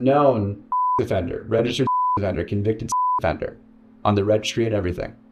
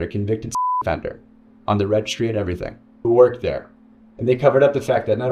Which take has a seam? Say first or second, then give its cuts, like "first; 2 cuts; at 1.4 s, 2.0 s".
first; 1 cut; at 0.9 s